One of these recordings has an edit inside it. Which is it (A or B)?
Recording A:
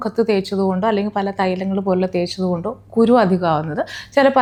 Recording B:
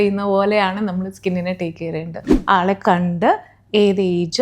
B